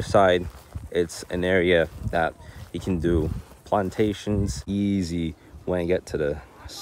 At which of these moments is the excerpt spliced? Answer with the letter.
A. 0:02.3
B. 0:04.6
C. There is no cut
B